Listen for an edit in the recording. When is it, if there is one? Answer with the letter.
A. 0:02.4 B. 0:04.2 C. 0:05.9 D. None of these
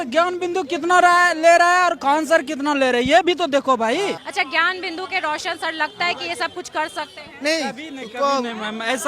B